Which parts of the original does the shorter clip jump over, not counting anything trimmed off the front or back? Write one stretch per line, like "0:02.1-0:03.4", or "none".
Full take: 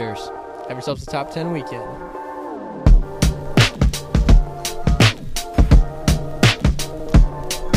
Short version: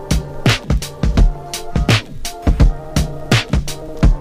none